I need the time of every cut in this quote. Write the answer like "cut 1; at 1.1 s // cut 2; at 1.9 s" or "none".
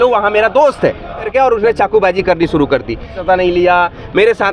cut 1; at 1.3 s // cut 2; at 3.1 s